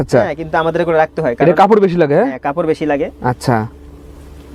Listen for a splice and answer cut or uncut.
uncut